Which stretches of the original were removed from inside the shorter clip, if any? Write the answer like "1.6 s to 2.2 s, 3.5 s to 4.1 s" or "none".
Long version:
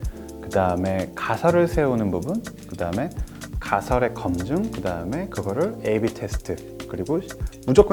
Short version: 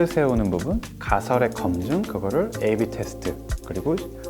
2.5 s to 3.5 s, 4.7 s to 5.3 s